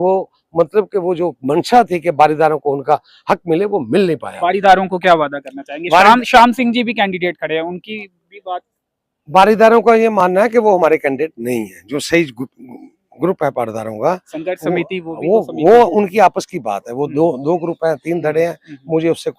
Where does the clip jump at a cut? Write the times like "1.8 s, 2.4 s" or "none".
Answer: 4.3 s